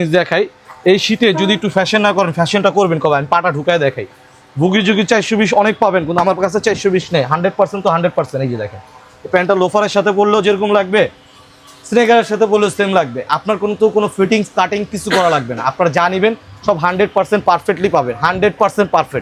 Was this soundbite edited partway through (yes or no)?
no